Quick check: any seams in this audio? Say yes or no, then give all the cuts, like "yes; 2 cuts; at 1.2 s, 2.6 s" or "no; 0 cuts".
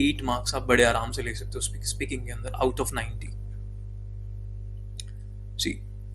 no; 0 cuts